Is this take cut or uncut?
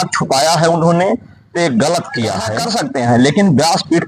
cut